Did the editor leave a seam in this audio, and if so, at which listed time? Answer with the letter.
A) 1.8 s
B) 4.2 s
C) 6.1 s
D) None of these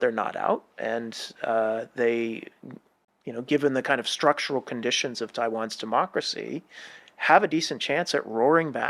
D